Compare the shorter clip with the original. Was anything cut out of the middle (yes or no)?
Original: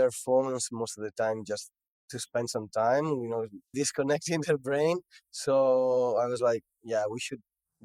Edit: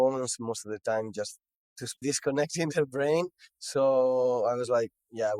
yes